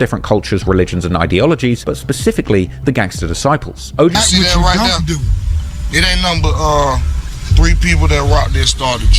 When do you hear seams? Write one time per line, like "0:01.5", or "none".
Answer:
0:04.1